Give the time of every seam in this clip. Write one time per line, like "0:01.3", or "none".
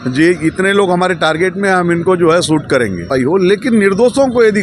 0:03.1